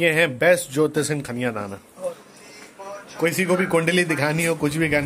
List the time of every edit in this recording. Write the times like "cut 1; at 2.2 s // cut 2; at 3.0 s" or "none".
cut 1; at 2.2 s

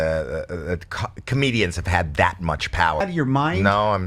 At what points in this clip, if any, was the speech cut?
cut 1; at 3.0 s

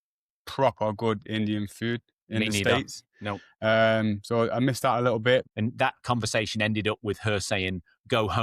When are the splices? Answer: cut 1; at 5.5 s

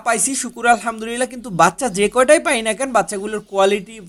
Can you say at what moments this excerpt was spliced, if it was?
none

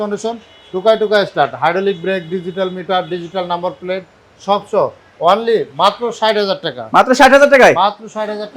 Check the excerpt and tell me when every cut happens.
none

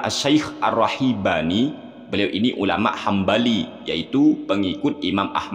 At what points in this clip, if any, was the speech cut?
none

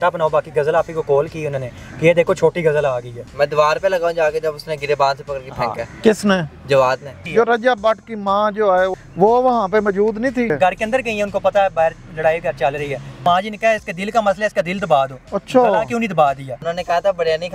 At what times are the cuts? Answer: cut 1; at 3.3 s // cut 2; at 7.2 s // cut 3; at 10.6 s // cut 4; at 13.2 s // cut 5; at 16.7 s

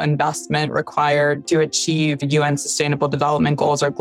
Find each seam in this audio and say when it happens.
cut 1; at 1.4 s

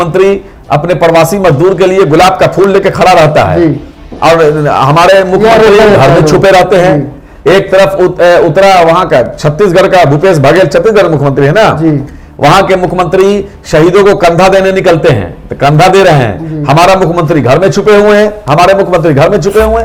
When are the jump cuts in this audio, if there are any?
none

